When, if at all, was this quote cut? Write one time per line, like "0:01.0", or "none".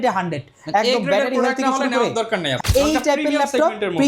0:02.5